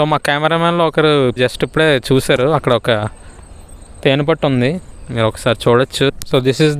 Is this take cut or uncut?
cut